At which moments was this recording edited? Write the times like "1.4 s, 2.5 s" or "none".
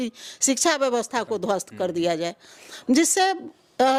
none